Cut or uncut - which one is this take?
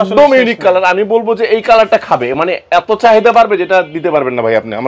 uncut